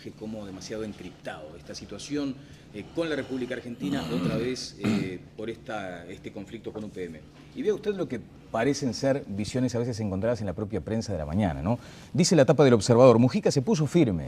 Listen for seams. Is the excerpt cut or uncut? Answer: cut